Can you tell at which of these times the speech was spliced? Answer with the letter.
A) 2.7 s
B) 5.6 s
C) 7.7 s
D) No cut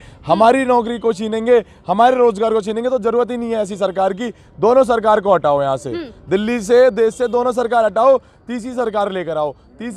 D